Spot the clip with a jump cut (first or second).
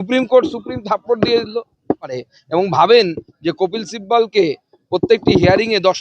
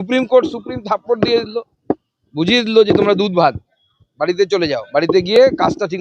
first